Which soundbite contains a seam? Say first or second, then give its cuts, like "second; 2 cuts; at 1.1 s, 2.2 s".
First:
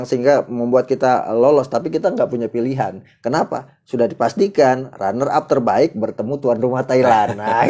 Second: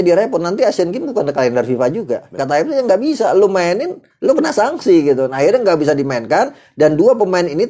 second; 1 cut; at 2.4 s